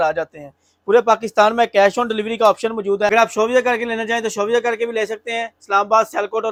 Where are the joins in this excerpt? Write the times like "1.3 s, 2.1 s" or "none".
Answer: none